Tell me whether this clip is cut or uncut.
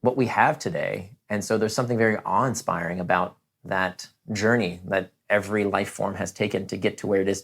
uncut